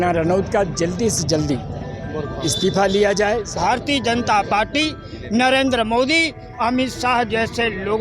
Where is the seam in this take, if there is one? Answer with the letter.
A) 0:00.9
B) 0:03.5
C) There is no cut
B